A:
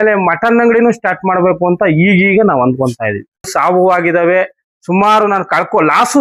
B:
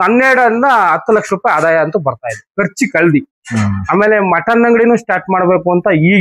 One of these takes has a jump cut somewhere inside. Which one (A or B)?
A